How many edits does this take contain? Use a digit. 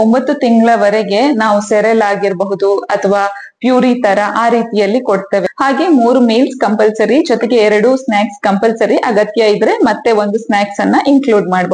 1